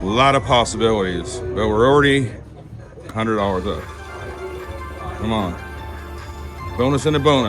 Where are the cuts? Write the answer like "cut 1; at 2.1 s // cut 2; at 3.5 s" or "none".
none